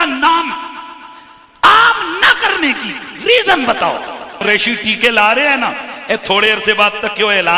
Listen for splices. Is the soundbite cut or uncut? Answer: cut